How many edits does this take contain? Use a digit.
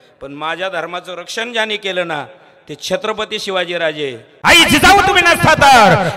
1